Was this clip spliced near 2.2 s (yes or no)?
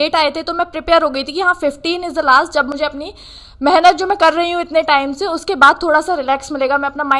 no